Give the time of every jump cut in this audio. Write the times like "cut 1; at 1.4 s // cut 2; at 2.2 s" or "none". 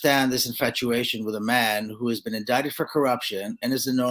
none